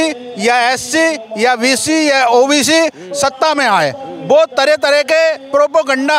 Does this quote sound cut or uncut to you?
uncut